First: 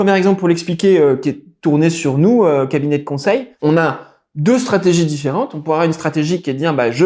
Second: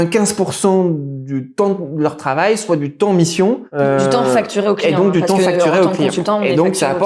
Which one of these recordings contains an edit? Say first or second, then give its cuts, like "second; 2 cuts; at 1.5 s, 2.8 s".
first; 1 cut; at 3.5 s